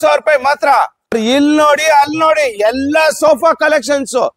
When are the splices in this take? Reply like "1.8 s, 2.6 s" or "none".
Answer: 1.0 s